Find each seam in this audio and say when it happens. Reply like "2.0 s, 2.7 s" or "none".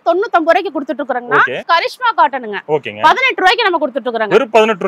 1.6 s